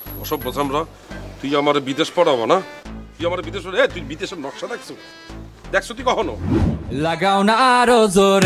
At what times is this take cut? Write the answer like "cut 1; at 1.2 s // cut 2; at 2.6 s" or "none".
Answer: cut 1; at 6.8 s